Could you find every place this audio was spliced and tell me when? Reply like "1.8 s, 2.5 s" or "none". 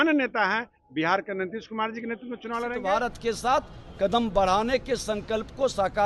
2.7 s